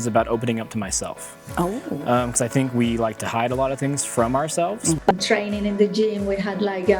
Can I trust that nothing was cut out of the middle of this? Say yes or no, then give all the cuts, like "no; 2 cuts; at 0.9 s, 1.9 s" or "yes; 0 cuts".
no; 1 cut; at 5.0 s